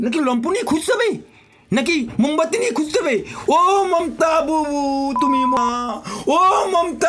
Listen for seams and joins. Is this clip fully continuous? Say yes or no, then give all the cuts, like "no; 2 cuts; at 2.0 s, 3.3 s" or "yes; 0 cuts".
no; 1 cut; at 5.5 s